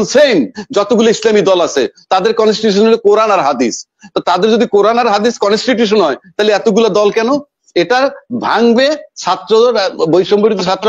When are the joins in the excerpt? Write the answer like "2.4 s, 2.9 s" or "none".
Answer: 7.6 s